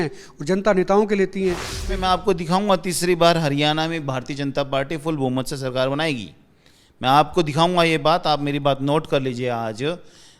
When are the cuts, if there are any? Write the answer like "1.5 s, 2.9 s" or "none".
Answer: 1.7 s